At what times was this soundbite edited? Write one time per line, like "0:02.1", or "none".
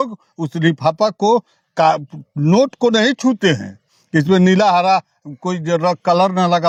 none